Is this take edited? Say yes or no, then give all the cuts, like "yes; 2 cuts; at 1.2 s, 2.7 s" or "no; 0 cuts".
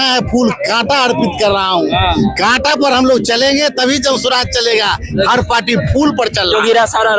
no; 0 cuts